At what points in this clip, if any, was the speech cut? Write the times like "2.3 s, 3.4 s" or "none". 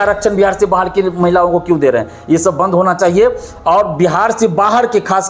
none